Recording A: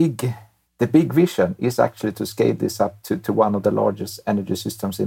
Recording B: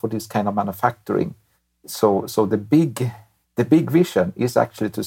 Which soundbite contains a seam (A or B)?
B